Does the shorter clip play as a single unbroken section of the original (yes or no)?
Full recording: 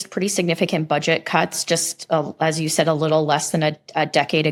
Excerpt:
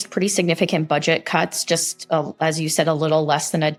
yes